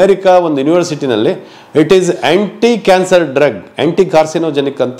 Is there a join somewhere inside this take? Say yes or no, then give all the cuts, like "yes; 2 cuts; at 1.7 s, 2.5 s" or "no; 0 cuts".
no; 0 cuts